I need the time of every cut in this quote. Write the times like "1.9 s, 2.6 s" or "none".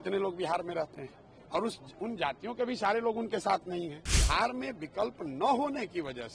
4.1 s

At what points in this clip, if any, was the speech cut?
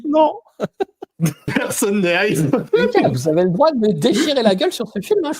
1.5 s, 2.7 s

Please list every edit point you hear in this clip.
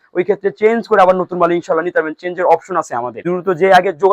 3.1 s

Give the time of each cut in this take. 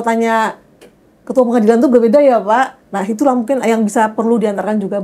2.9 s

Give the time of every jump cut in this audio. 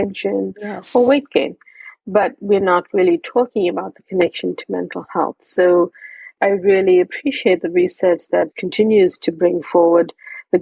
6.3 s, 8.6 s

